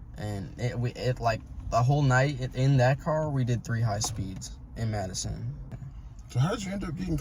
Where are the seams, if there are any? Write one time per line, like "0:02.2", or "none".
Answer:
0:05.7

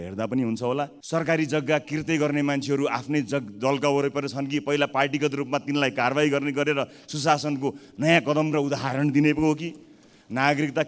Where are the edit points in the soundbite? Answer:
0:01.0

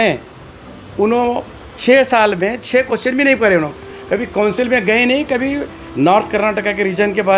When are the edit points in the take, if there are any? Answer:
none

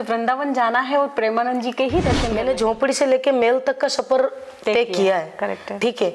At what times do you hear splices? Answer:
0:02.3

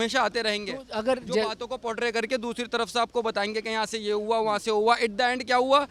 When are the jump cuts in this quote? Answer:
none

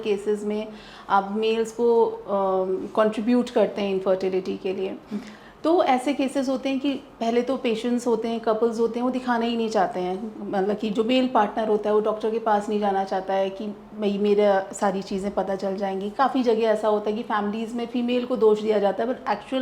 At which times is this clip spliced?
none

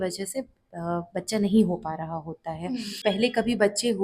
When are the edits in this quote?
0:03.0

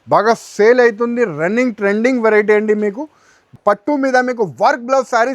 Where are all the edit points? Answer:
0:03.5

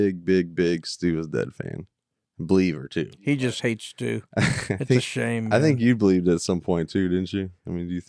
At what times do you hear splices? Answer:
0:03.3

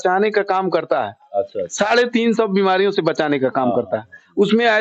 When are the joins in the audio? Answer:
none

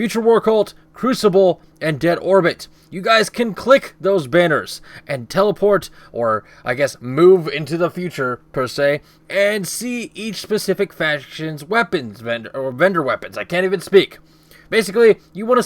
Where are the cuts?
0:06.3

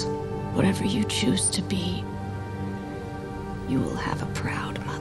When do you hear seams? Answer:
none

